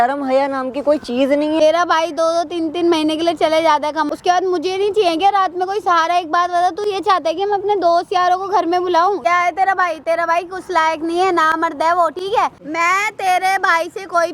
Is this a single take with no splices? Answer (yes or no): no